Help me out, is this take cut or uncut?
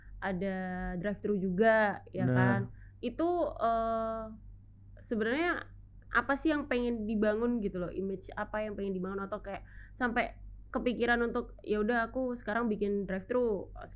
uncut